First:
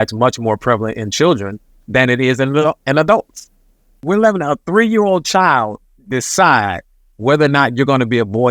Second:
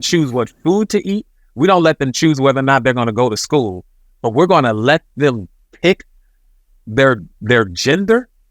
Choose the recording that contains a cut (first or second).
first